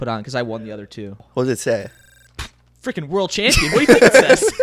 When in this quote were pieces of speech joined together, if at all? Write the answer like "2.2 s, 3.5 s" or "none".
1.2 s